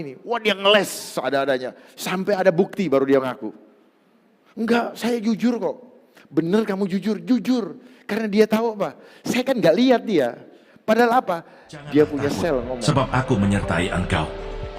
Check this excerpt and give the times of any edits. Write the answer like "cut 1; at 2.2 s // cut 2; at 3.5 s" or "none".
cut 1; at 12.8 s